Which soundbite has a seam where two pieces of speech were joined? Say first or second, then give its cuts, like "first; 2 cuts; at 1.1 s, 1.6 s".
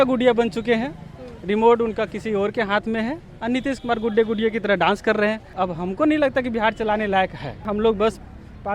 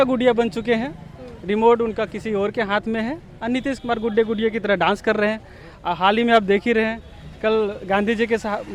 first; 2 cuts; at 5.5 s, 7.7 s